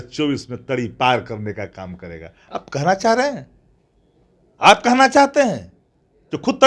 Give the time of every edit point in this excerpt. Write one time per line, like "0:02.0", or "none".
none